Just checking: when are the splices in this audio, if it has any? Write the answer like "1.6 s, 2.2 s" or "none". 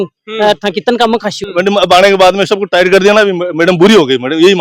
1.4 s